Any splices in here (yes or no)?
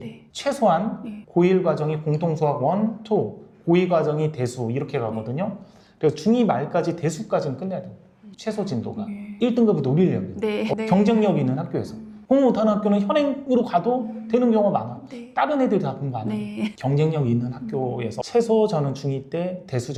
no